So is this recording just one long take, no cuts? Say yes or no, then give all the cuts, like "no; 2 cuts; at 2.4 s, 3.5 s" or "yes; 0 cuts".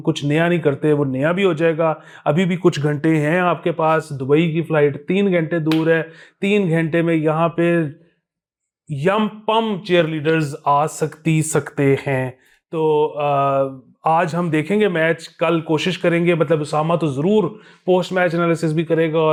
yes; 0 cuts